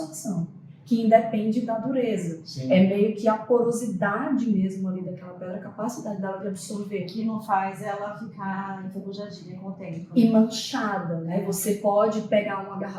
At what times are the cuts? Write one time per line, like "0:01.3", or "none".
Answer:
none